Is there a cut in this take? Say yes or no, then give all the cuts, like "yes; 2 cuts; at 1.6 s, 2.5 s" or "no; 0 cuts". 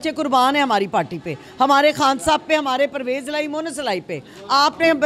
no; 0 cuts